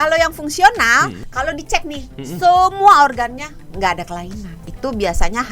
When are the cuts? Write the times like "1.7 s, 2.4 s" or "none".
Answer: 1.2 s, 4.6 s